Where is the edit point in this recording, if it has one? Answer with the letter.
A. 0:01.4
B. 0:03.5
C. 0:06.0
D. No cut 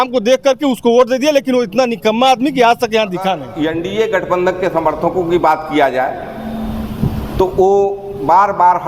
B